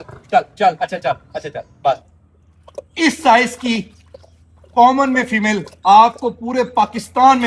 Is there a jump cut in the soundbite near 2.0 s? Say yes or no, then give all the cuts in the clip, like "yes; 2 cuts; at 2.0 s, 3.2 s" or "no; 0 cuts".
yes; 1 cut; at 2.0 s